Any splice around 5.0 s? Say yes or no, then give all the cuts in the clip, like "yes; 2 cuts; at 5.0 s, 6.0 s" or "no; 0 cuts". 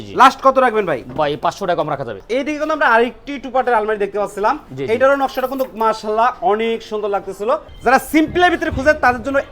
no; 2 cuts; at 2.2 s, 7.7 s